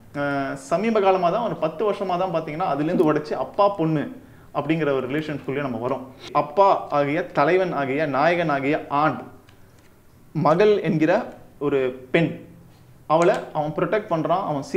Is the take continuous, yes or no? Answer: no